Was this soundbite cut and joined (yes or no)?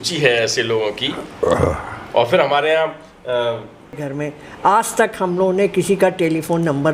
yes